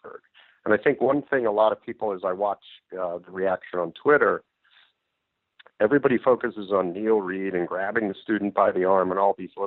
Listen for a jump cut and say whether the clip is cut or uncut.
uncut